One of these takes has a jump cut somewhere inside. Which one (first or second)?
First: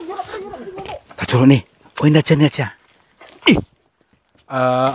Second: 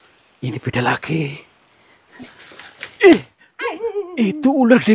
second